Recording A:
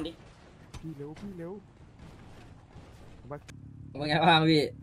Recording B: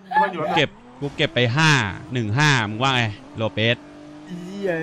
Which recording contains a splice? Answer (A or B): A